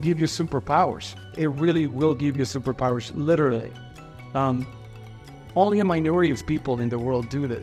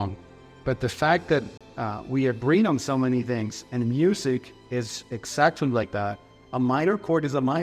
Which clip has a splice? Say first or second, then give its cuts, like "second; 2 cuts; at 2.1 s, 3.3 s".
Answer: second; 1 cut; at 1.5 s